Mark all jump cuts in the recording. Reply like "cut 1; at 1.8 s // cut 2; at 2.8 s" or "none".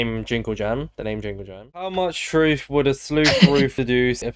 cut 1; at 1.8 s

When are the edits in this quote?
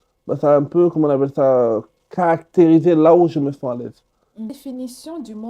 cut 1; at 4.5 s

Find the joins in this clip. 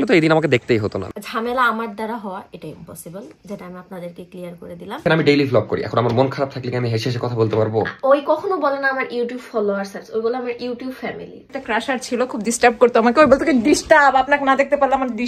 cut 1; at 1.1 s // cut 2; at 5.0 s // cut 3; at 11.5 s

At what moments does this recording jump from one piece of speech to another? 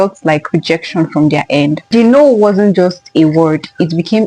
cut 1; at 2.0 s

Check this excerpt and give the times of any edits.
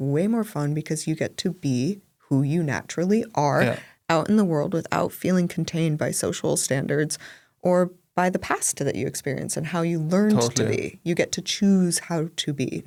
none

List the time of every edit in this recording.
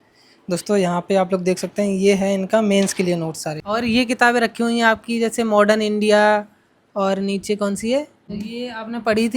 cut 1; at 3.5 s // cut 2; at 8.2 s

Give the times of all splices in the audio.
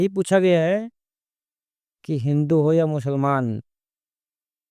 none

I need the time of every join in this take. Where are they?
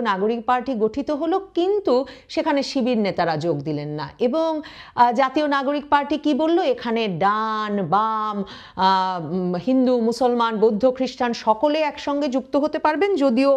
none

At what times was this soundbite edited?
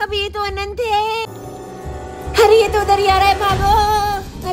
cut 1; at 1.3 s

